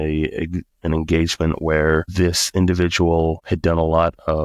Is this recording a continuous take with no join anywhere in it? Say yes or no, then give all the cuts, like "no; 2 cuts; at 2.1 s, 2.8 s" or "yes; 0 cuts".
yes; 0 cuts